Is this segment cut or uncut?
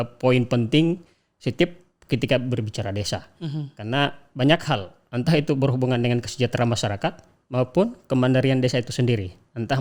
uncut